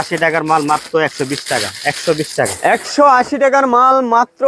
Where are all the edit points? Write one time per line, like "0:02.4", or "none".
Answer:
none